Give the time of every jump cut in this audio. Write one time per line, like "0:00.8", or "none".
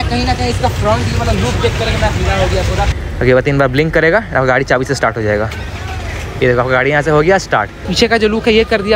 0:03.0
0:07.9